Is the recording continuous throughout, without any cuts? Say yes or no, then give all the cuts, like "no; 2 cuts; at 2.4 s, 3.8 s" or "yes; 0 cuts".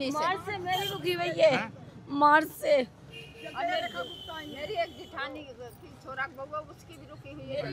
yes; 0 cuts